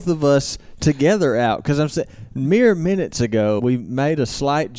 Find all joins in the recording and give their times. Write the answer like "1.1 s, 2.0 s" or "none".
3.6 s